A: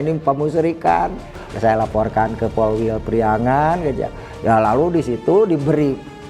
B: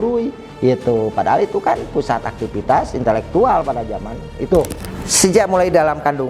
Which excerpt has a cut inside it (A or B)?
B